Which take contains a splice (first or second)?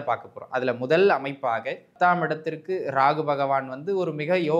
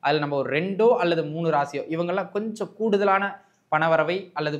first